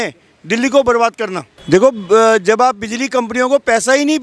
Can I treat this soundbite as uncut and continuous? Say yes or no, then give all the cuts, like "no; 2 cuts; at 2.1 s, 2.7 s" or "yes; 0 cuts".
no; 1 cut; at 1.5 s